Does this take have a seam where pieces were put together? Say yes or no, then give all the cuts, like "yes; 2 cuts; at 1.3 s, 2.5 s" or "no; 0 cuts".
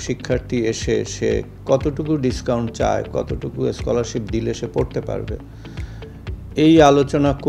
no; 0 cuts